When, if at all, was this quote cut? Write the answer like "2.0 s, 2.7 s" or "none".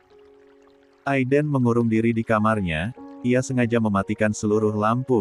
1.0 s